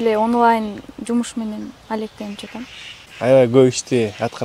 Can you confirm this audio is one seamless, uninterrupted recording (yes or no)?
no